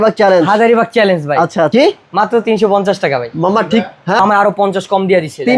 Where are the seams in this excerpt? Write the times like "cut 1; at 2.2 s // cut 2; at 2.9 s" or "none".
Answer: cut 1; at 1.7 s // cut 2; at 4.2 s